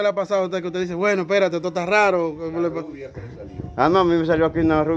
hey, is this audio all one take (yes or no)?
yes